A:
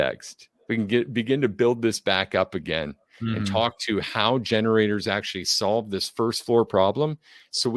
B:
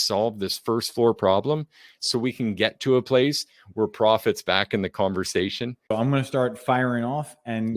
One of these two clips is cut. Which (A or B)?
B